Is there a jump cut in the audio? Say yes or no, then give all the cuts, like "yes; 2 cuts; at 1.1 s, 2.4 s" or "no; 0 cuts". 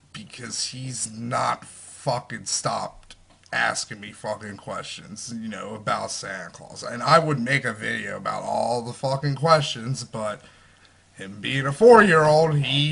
yes; 1 cut; at 7.9 s